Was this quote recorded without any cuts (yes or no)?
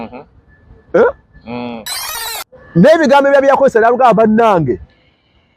yes